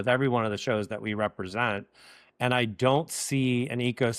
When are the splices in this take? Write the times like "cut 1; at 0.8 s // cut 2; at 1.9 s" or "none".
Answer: none